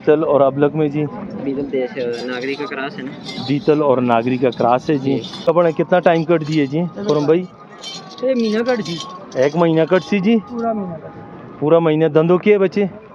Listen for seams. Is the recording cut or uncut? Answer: cut